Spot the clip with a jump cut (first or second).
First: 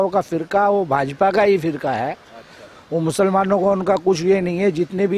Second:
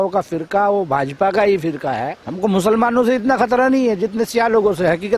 second